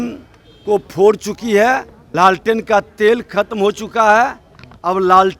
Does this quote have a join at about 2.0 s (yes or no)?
yes